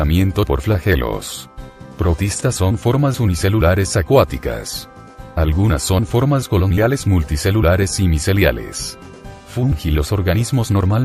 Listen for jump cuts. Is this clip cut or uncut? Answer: cut